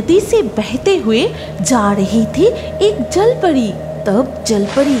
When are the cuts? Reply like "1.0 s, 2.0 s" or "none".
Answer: none